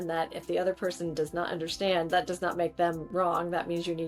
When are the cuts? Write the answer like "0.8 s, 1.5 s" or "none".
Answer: 3.0 s